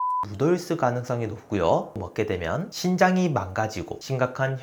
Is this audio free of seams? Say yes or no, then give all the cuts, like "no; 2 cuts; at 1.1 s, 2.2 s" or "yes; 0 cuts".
no; 1 cut; at 2.0 s